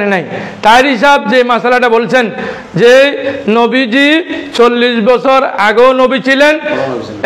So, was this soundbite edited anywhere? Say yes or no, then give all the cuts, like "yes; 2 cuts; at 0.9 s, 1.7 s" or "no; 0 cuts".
no; 0 cuts